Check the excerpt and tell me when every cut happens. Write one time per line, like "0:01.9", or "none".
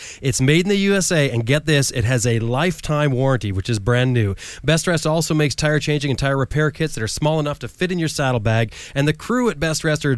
none